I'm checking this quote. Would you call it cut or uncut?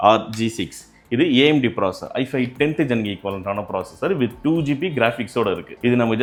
uncut